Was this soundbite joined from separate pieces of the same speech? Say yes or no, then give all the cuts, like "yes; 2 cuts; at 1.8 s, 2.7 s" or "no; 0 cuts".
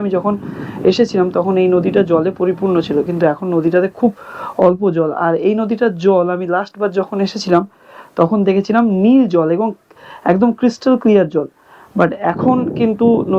no; 0 cuts